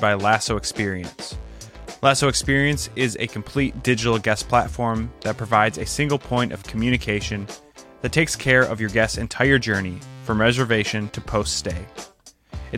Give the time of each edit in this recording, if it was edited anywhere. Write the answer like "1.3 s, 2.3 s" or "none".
none